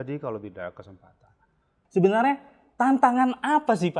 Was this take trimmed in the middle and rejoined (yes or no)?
yes